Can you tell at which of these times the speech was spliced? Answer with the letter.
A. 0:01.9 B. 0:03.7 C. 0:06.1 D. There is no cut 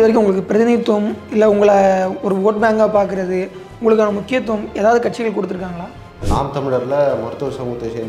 C